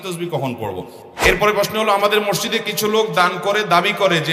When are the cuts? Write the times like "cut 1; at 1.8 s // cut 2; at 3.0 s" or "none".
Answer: cut 1; at 1.0 s